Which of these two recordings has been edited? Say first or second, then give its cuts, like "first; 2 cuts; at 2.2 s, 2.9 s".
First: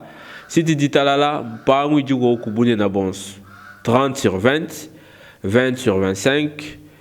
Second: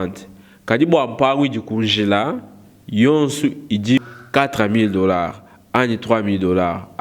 second; 1 cut; at 4.0 s